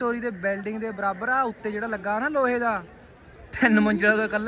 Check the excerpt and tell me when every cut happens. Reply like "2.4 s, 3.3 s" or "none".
none